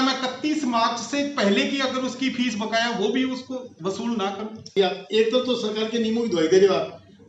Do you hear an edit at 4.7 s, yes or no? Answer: yes